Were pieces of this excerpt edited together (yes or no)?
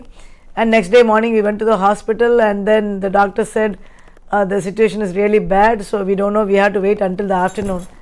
no